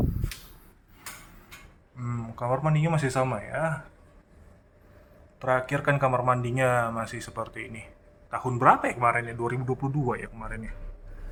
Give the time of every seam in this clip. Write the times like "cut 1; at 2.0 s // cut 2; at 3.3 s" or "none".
none